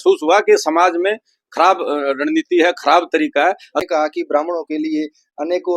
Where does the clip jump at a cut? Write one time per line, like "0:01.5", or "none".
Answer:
0:03.8